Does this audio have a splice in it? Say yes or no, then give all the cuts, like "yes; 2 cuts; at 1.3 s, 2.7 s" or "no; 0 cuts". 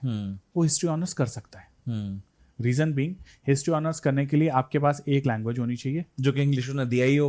no; 0 cuts